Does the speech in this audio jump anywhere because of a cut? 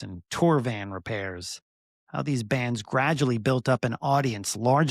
no; 0 cuts

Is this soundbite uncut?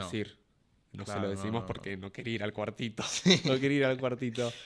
yes; 0 cuts

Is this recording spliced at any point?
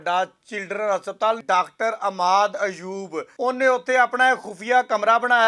yes; 2 cuts; at 1.4 s, 3.3 s

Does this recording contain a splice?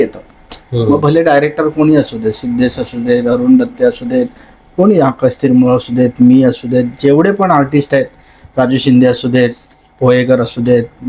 no; 0 cuts

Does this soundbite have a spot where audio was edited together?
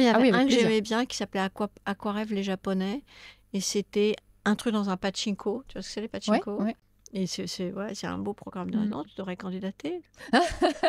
yes; 1 cut; at 6.9 s

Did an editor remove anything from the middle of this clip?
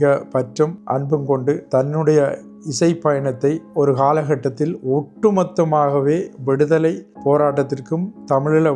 yes; 3 cuts; at 1.2 s, 3.6 s, 7.1 s

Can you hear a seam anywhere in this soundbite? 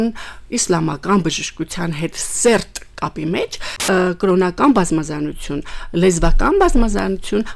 yes; 1 cut; at 3.7 s

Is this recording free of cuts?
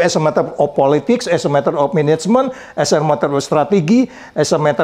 yes; 0 cuts

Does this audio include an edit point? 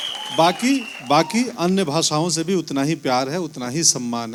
no; 0 cuts

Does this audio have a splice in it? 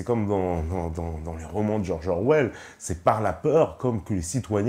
no; 0 cuts

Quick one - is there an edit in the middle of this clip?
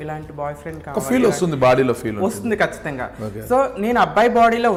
no; 0 cuts

